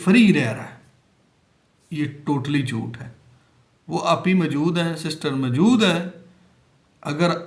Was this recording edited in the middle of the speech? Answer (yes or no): no